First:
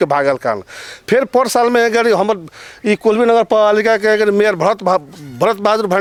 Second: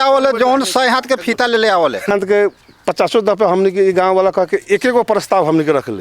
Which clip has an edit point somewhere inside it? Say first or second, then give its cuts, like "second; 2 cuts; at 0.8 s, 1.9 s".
second; 1 cut; at 2.1 s